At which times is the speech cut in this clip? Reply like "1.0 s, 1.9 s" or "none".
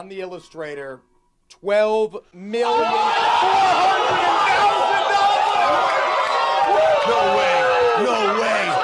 none